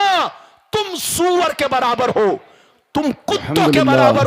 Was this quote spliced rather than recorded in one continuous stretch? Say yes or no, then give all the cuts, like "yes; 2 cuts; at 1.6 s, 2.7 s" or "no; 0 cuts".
no; 0 cuts